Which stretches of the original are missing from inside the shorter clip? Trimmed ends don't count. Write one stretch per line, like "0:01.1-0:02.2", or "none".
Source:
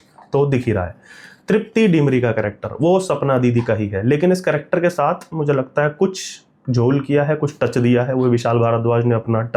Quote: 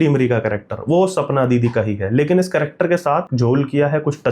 0:05.2-0:06.6